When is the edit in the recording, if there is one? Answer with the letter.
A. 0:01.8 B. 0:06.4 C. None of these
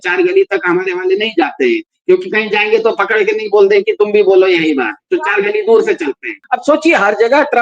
B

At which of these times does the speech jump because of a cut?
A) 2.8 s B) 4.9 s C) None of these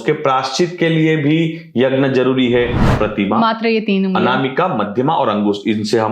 A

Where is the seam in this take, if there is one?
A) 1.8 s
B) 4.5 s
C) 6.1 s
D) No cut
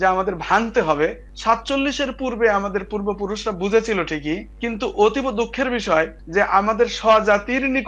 D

